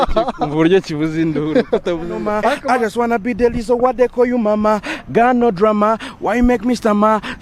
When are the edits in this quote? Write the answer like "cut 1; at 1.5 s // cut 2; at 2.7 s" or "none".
cut 1; at 2.6 s